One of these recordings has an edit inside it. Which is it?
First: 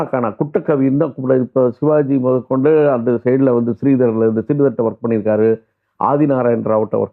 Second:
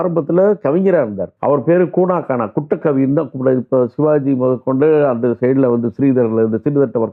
second; 1 cut; at 1.3 s

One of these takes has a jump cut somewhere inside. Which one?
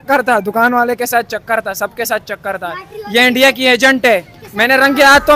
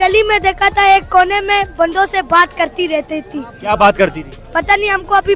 first; 1 cut; at 4.4 s

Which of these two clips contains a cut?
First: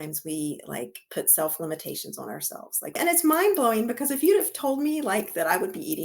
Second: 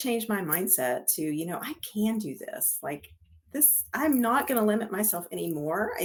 first; 1 cut; at 3.0 s

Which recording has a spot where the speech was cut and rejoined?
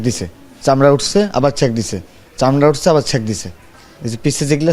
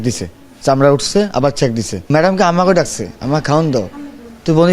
second; 1 cut; at 2.1 s

